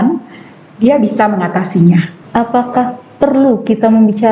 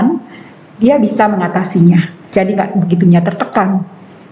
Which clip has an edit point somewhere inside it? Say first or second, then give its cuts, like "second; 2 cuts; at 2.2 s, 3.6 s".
first; 1 cut; at 2.2 s